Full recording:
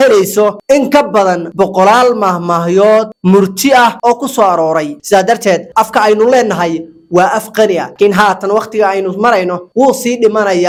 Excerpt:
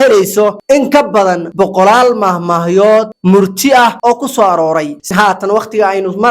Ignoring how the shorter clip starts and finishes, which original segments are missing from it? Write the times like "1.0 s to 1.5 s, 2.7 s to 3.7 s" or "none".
5.1 s to 8.1 s